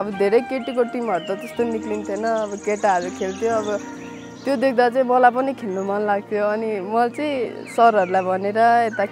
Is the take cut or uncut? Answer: uncut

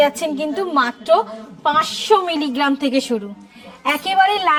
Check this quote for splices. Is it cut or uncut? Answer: uncut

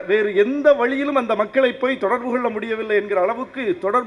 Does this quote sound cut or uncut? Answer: uncut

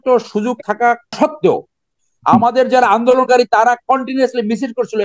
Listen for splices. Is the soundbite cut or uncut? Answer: cut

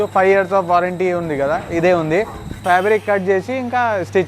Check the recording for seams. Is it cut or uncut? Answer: cut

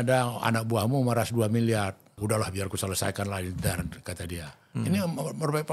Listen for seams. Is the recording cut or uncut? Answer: cut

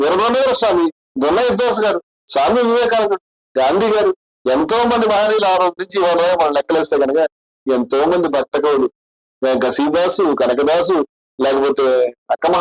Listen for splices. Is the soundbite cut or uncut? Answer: uncut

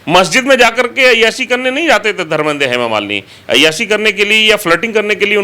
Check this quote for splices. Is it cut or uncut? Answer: uncut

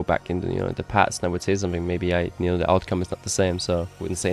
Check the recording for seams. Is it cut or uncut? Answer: uncut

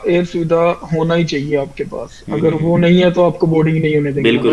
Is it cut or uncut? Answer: uncut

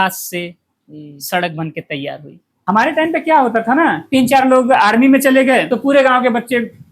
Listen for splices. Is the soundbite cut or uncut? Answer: cut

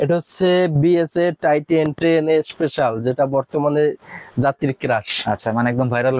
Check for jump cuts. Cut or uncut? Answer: uncut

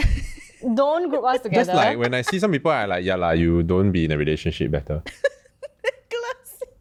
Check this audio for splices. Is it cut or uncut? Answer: uncut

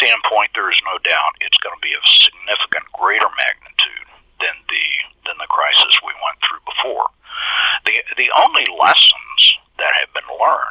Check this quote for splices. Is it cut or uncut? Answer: uncut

